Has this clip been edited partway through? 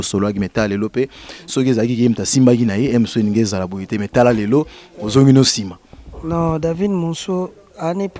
no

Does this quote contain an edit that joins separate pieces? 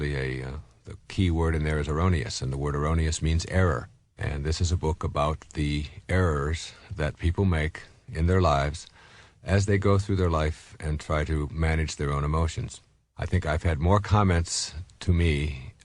yes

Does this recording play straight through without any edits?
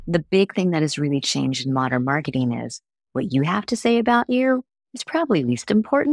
yes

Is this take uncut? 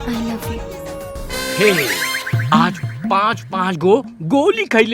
no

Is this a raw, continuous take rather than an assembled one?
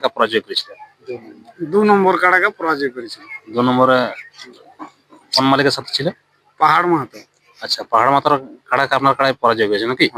yes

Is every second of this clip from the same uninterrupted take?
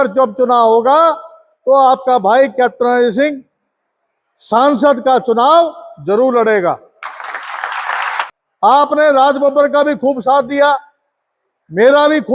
no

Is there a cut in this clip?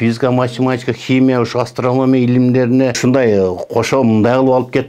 yes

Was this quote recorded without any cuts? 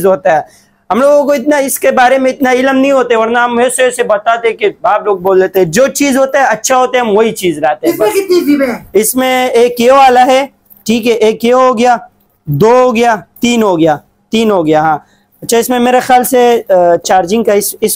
yes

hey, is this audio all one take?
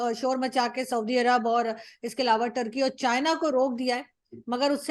yes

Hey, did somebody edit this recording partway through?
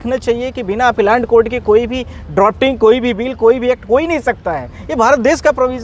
no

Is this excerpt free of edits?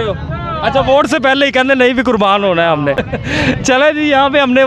yes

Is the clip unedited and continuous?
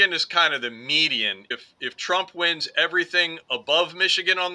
no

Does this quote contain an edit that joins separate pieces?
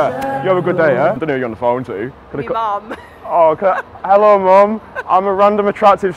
yes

